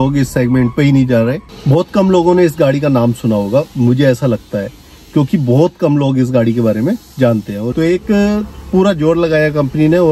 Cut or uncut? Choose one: cut